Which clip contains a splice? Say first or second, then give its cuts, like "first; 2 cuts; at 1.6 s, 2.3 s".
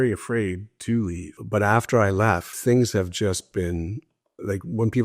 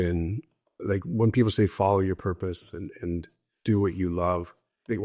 first; 2 cuts; at 1.3 s, 2.5 s